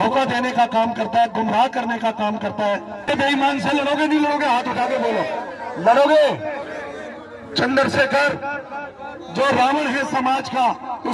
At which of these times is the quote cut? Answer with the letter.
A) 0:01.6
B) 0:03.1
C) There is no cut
B